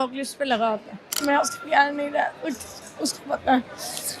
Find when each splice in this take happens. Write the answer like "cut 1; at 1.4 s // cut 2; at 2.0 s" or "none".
cut 1; at 1.0 s